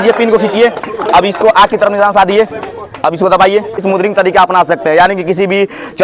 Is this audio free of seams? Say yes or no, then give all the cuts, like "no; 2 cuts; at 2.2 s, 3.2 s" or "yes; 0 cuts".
no; 1 cut; at 3.8 s